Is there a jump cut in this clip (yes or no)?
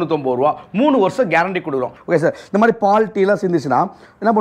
yes